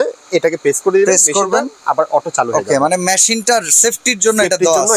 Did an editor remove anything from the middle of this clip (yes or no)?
no